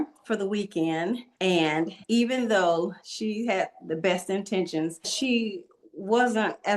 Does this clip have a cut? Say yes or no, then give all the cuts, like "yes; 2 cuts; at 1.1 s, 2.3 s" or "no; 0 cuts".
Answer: yes; 3 cuts; at 1.6 s, 3.1 s, 5.1 s